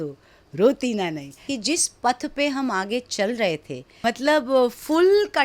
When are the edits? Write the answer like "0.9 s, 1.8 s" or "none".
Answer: 1.5 s, 4.0 s